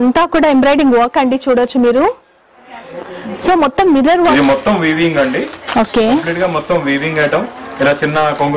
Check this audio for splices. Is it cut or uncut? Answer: cut